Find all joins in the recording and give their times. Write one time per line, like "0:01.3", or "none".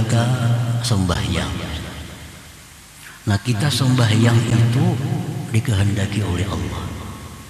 none